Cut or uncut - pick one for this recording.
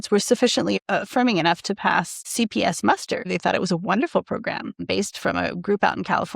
cut